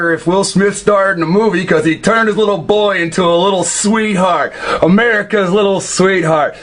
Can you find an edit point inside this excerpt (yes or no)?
yes